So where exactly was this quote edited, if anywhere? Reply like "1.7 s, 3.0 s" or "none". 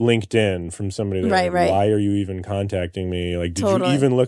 none